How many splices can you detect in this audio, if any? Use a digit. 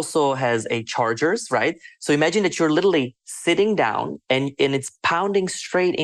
0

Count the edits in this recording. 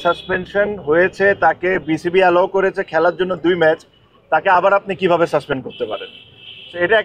0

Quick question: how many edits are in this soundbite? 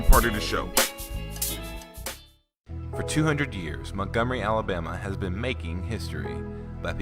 1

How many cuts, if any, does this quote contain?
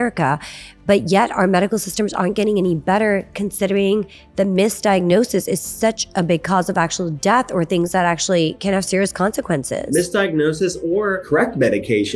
2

